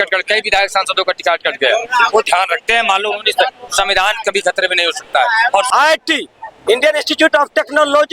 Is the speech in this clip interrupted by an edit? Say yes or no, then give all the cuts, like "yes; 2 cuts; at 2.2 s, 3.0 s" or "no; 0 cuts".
yes; 1 cut; at 5.7 s